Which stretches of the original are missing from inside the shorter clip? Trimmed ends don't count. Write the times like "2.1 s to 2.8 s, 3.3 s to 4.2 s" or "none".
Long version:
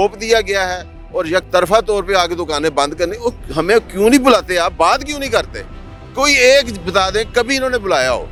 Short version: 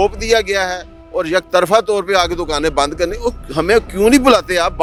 none